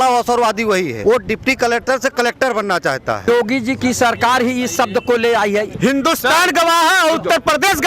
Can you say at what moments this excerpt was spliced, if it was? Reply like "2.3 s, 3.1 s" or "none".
1.0 s, 3.3 s, 5.7 s